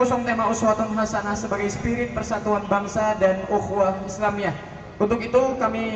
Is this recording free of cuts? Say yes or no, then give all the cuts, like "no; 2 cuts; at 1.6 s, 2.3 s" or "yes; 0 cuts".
no; 1 cut; at 3.3 s